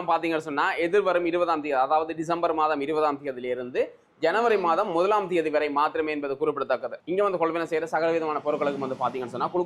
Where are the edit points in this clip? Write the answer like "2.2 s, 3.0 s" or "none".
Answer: 6.9 s